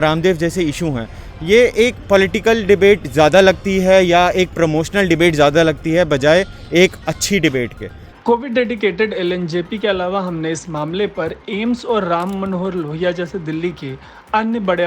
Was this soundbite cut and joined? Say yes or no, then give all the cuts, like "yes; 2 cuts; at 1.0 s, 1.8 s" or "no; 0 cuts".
no; 0 cuts